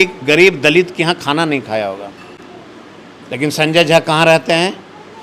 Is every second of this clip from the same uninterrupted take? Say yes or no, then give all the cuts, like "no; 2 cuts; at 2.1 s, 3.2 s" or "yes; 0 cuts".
yes; 0 cuts